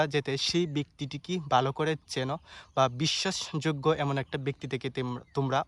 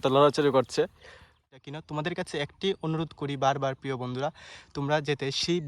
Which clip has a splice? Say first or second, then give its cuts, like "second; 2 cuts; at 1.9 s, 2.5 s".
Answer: second; 1 cut; at 1.4 s